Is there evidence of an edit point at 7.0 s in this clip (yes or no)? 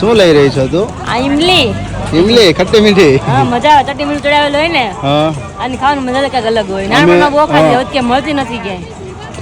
no